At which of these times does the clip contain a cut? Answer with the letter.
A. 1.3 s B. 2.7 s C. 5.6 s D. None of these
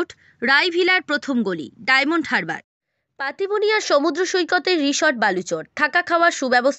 B